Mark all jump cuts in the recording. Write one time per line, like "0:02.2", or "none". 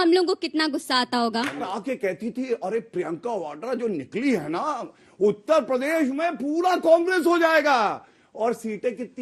0:01.7

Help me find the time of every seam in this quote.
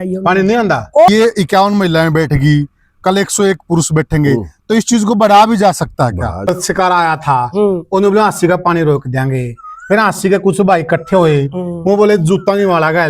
0:01.1
0:06.5

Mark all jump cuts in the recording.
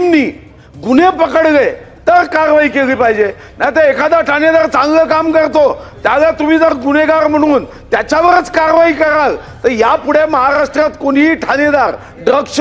none

